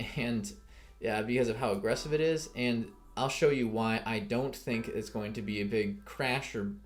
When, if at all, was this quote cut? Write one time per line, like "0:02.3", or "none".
none

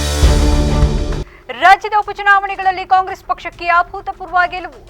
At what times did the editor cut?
0:01.3

